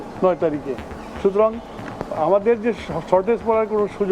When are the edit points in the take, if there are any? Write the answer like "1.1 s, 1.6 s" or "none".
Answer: none

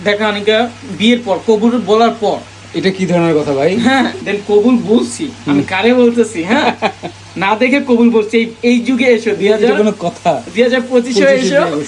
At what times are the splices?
4.3 s

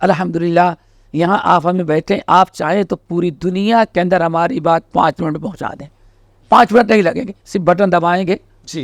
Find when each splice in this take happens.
none

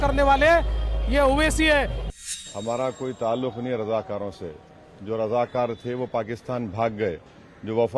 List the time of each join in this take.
2.2 s

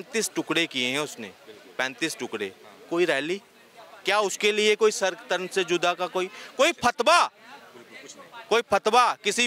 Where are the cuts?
none

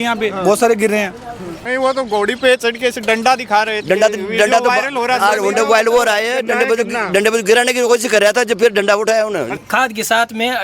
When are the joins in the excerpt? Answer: 1.7 s, 9.5 s

